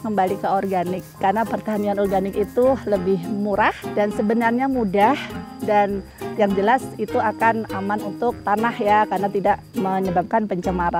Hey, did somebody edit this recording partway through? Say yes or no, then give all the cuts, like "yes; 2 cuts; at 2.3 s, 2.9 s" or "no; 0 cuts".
yes; 3 cuts; at 1.1 s, 3.8 s, 8.4 s